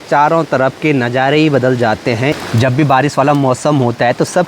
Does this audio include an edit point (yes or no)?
yes